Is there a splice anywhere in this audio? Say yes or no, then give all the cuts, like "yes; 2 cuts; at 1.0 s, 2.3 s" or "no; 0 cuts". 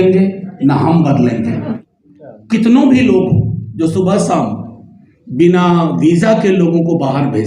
yes; 1 cut; at 1.6 s